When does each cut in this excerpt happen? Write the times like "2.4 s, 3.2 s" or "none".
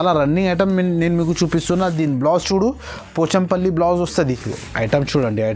4.1 s